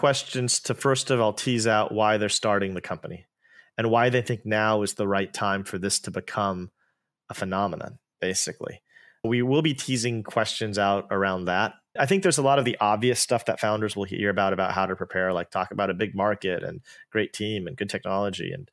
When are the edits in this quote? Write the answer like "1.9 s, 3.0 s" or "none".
none